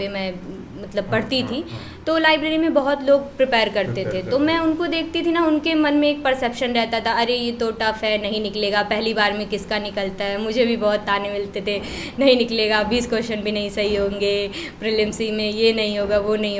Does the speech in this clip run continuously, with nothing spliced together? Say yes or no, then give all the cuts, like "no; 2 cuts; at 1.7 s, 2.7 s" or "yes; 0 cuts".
yes; 0 cuts